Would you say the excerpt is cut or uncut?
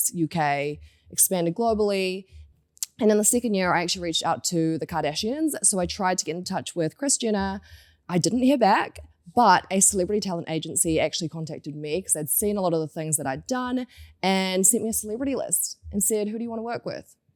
uncut